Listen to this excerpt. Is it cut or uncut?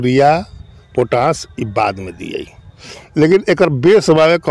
uncut